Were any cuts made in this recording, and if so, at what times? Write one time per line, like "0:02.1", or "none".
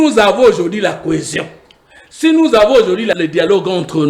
0:03.2